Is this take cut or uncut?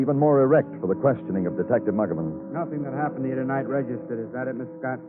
uncut